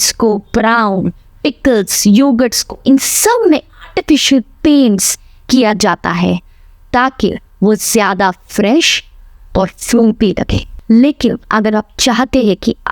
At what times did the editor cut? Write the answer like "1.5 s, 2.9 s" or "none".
10.7 s